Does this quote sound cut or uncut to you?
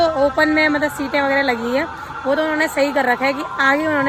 uncut